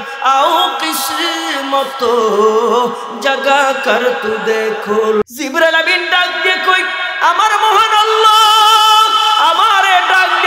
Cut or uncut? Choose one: cut